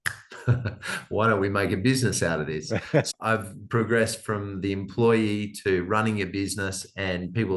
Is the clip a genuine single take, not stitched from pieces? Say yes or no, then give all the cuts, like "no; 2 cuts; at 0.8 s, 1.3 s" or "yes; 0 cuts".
no; 1 cut; at 3.1 s